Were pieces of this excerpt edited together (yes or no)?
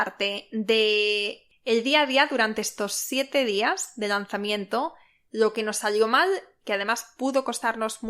yes